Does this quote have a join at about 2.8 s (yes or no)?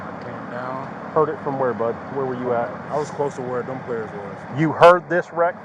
yes